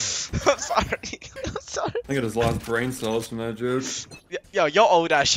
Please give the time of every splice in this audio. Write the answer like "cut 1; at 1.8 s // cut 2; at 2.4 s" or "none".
cut 1; at 2.1 s